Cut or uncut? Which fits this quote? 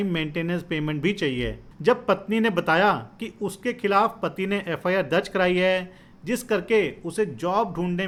uncut